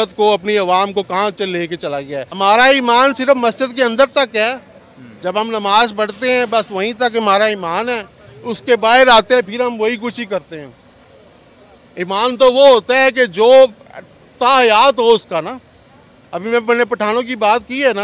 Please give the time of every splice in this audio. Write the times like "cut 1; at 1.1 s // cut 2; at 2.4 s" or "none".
cut 1; at 2.3 s